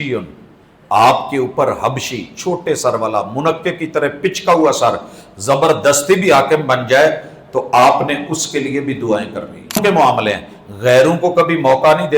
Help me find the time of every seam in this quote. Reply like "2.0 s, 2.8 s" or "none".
9.8 s